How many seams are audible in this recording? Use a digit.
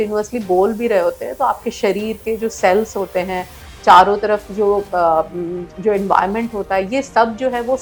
0